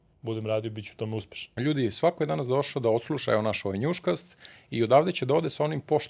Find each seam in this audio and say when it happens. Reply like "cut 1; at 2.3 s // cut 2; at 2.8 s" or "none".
cut 1; at 1.5 s